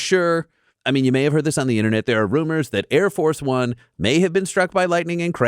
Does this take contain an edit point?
no; 0 cuts

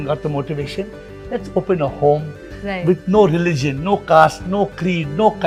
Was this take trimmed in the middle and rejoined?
no; 0 cuts

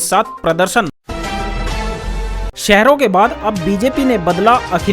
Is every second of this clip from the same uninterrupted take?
no; 2 cuts; at 1.0 s, 2.5 s

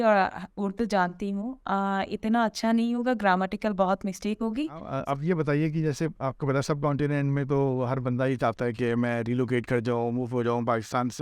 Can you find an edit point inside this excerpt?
yes; 1 cut; at 4.9 s

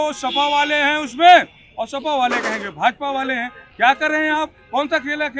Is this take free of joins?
yes; 0 cuts

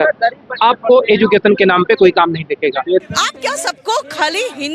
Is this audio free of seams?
no; 1 cut; at 3.0 s

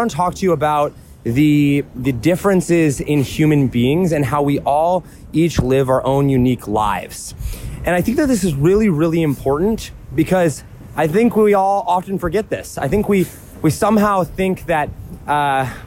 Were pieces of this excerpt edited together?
no; 0 cuts

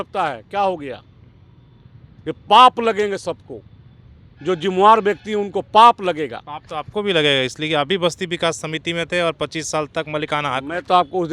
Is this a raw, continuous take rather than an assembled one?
yes; 0 cuts

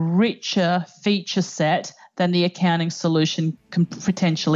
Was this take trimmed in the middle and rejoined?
no; 0 cuts

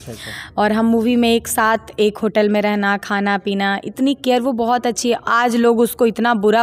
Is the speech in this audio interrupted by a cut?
no; 0 cuts

